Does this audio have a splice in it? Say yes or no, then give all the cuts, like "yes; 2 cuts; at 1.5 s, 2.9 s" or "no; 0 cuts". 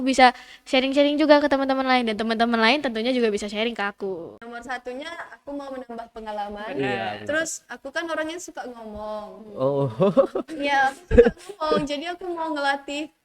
yes; 1 cut; at 4.5 s